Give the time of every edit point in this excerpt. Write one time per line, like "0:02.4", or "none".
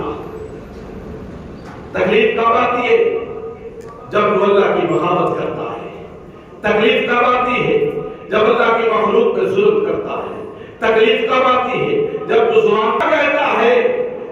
0:13.0